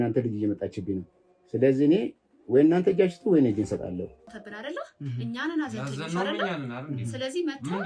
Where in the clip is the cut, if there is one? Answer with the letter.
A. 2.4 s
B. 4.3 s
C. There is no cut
B